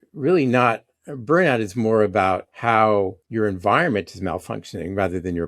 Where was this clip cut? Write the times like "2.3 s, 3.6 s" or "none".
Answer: 2.5 s, 3.2 s